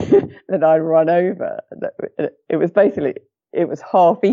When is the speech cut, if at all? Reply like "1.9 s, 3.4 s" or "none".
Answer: none